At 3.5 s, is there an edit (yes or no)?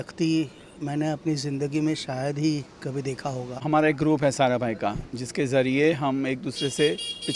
yes